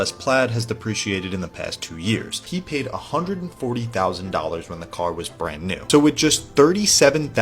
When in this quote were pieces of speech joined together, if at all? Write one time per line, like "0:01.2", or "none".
0:02.4
0:05.8

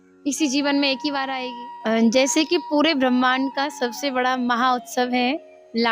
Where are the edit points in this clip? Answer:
0:01.4

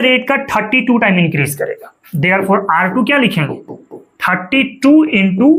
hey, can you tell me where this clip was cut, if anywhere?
none

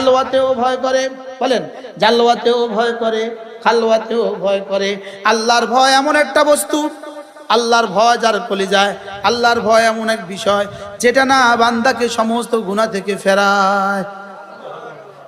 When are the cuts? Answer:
none

